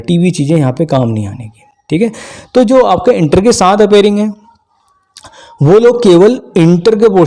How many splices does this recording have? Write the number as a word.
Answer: zero